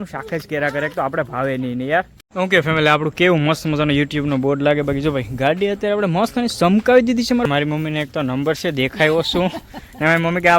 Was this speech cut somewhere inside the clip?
yes; 2 cuts; at 2.1 s, 7.4 s

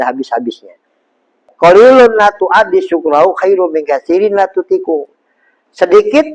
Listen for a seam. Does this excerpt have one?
yes; 1 cut; at 1.5 s

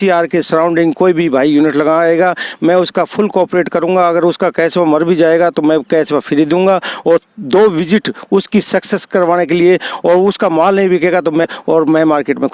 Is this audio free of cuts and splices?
no; 1 cut; at 11.5 s

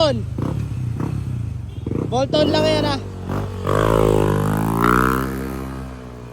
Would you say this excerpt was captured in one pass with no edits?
yes; 0 cuts

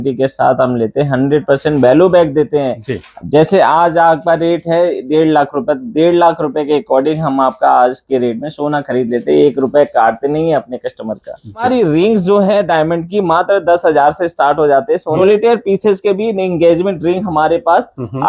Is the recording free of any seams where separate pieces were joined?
no; 2 cuts; at 11.6 s, 15.2 s

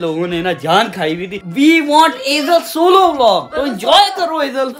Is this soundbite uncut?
yes; 0 cuts

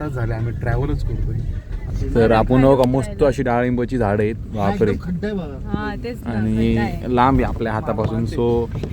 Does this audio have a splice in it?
yes; 1 cut; at 1.9 s

